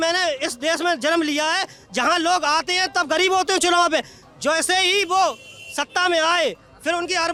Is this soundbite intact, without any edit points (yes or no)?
yes